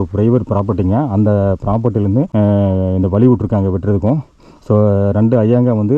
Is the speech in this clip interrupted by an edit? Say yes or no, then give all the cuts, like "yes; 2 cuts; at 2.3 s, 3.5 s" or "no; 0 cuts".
yes; 1 cut; at 2.1 s